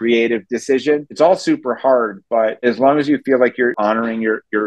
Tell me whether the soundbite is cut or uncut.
cut